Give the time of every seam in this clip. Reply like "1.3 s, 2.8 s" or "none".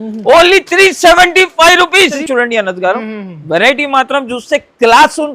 2.2 s